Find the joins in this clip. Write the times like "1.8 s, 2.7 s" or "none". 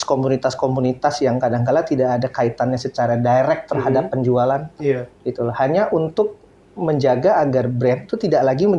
none